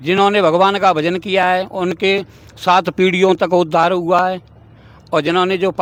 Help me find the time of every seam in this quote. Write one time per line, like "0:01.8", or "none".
none